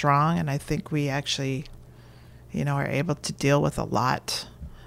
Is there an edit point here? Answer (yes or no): no